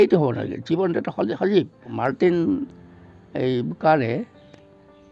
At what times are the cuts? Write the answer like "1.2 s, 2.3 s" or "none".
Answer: 2.0 s